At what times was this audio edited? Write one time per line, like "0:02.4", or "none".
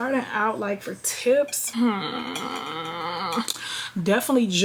none